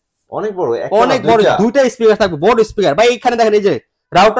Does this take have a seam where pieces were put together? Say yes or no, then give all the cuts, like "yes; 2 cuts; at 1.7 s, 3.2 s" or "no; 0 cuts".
no; 0 cuts